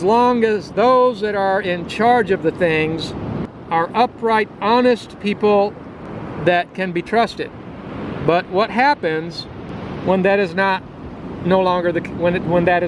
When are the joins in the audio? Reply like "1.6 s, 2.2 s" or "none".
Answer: 3.5 s